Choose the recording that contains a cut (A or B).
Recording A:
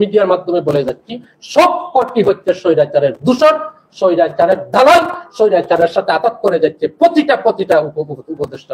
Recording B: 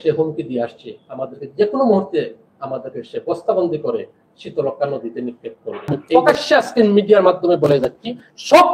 B